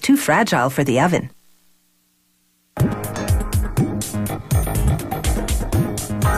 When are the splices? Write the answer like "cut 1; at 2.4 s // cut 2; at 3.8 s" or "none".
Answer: none